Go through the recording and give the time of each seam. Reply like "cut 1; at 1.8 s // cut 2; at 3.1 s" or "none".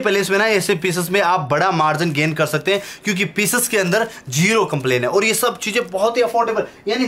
none